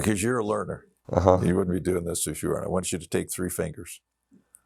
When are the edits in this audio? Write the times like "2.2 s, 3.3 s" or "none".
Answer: none